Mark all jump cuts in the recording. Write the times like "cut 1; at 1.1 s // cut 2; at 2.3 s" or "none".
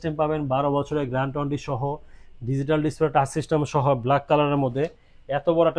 none